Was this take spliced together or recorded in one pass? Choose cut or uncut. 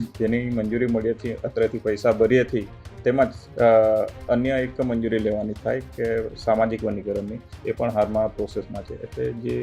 uncut